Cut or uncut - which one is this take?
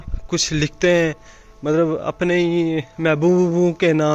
uncut